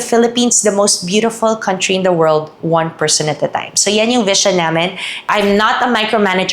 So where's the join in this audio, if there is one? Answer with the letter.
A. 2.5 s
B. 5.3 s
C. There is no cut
B